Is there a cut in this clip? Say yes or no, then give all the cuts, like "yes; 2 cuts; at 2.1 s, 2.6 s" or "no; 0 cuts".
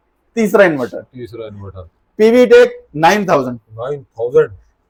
no; 0 cuts